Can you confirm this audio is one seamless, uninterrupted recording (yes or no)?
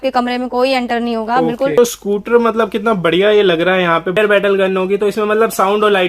no